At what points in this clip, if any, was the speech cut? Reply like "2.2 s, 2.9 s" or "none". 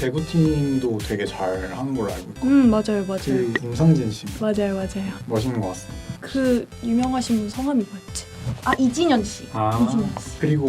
6.1 s